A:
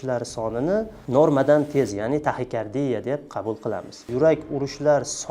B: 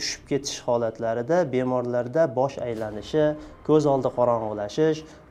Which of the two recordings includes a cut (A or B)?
A